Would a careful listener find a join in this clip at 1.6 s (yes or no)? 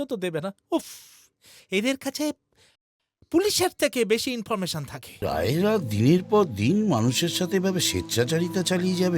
no